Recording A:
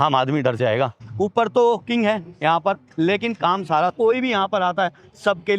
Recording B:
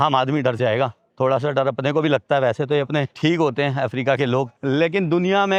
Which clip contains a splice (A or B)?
A